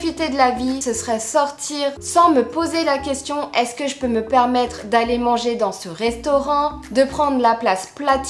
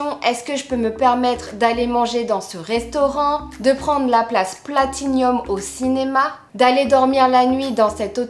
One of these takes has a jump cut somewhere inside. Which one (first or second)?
first